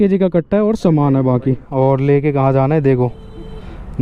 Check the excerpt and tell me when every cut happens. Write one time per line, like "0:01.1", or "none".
0:01.6